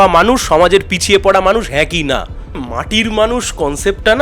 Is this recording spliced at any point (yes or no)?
yes